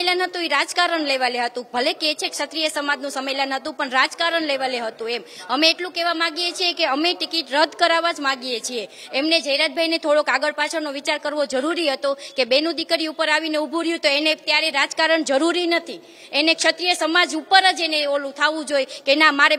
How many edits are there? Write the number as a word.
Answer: zero